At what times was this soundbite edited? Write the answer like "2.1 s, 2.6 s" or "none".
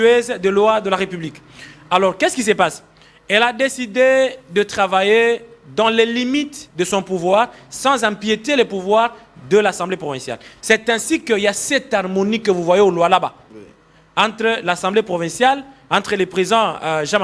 none